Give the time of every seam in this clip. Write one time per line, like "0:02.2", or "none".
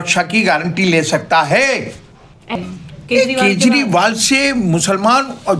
0:02.6